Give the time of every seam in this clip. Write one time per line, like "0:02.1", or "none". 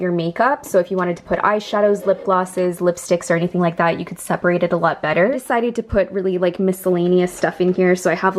0:05.4